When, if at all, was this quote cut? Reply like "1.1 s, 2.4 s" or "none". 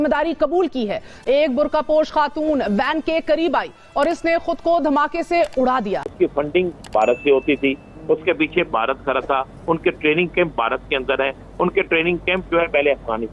1.1 s, 6.1 s